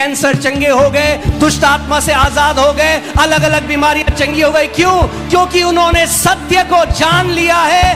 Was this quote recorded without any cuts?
yes; 0 cuts

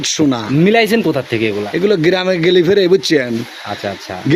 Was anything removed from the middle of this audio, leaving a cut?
no; 0 cuts

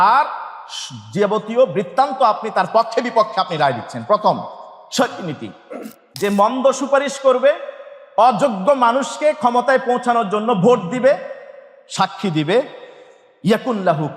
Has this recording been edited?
yes; 1 cut; at 6.1 s

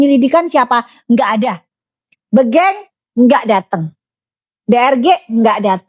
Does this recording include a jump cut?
no; 0 cuts

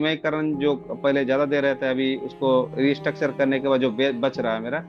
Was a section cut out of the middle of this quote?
no; 0 cuts

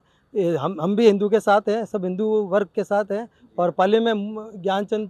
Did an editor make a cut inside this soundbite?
no; 0 cuts

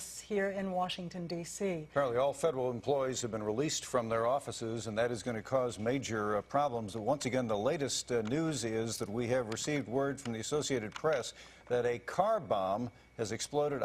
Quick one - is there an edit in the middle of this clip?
yes; 1 cut; at 10.8 s

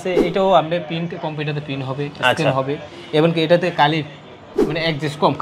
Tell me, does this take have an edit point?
no; 0 cuts

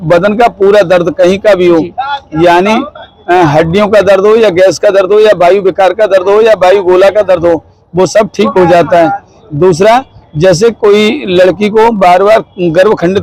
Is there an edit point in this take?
no; 0 cuts

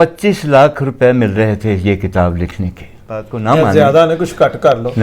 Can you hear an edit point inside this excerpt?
yes; 1 cut; at 3.3 s

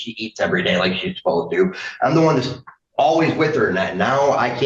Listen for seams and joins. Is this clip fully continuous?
yes; 0 cuts

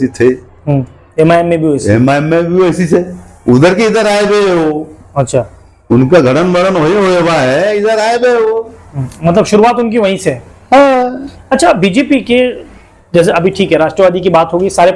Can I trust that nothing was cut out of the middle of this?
yes; 0 cuts

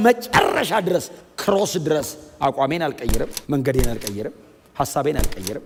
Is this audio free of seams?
yes; 0 cuts

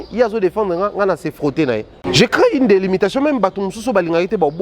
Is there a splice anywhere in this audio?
yes; 1 cut; at 2.0 s

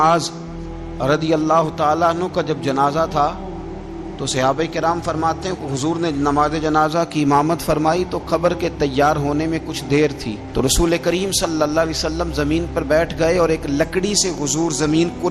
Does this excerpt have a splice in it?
no; 0 cuts

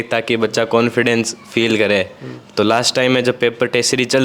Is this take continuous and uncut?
yes; 0 cuts

